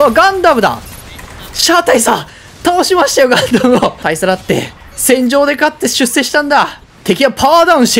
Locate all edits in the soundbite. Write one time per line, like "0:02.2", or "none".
0:04.0
0:06.9